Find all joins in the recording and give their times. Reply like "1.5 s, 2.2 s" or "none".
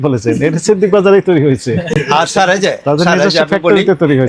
none